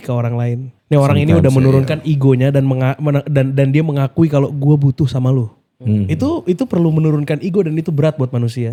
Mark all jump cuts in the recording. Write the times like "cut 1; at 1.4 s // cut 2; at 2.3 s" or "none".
none